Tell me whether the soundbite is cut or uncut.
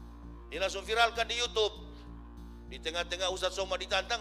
uncut